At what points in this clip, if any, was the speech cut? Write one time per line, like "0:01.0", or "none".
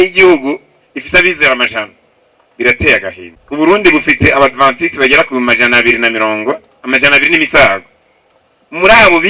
0:03.3